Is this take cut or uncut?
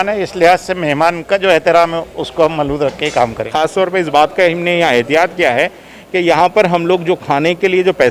cut